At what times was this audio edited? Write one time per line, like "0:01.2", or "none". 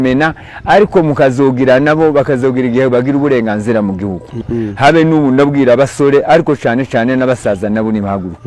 0:04.5

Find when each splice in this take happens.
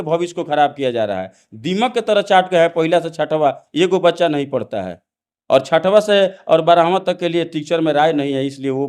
none

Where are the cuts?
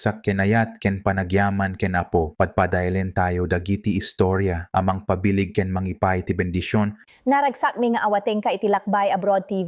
0:07.1

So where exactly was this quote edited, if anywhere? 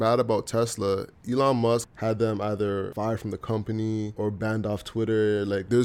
0:01.9
0:02.9
0:04.1

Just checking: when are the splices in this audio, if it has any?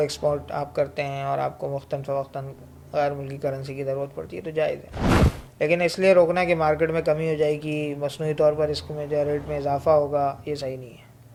none

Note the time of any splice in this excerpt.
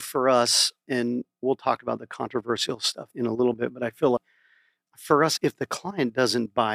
0:01.0
0:03.0
0:04.2

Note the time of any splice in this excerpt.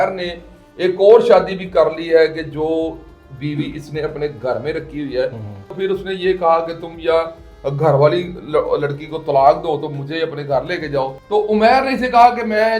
0:05.7
0:11.2

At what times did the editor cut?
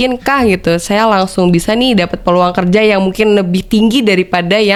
none

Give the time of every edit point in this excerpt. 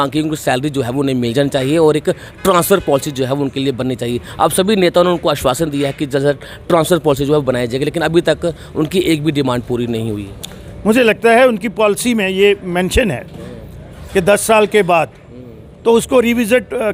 none

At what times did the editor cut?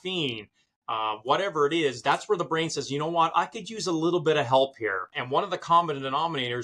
0:05.2

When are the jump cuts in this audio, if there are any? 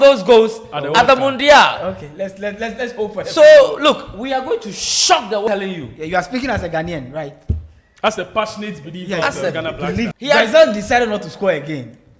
0:05.5
0:10.1

